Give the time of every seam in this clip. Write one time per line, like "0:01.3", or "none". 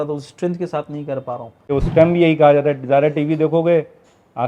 0:01.7